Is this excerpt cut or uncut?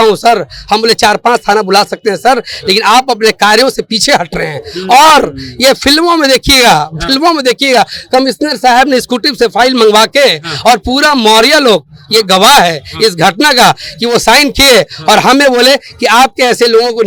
uncut